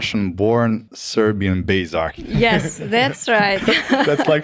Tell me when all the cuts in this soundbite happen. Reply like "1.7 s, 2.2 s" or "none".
1.0 s